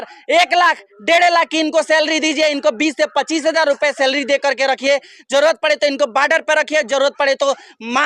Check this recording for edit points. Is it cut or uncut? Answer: uncut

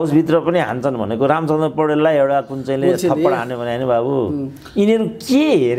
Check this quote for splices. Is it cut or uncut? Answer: uncut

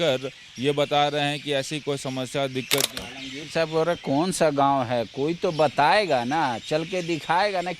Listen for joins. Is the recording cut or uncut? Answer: cut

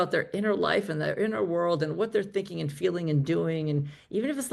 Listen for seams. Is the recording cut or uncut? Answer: uncut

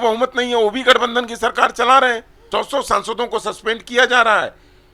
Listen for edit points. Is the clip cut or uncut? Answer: cut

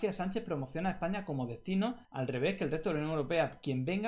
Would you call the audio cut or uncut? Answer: cut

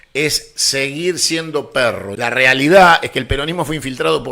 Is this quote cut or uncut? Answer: cut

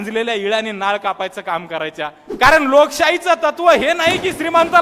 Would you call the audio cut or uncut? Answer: cut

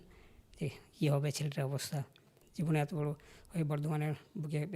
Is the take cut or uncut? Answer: cut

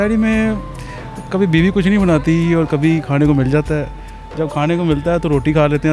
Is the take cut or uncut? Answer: uncut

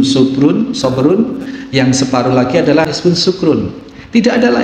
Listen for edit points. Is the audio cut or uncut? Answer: cut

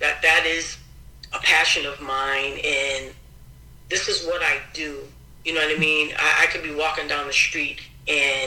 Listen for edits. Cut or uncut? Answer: uncut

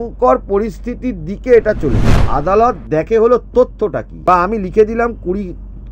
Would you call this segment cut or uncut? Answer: cut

